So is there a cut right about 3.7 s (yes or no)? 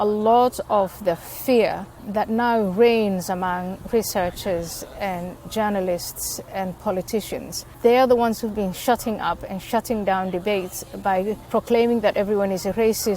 no